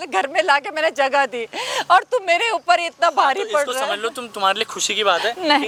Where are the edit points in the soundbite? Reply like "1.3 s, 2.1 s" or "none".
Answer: none